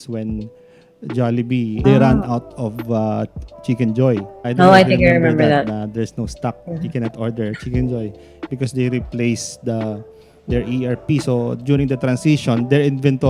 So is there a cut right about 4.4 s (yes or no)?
yes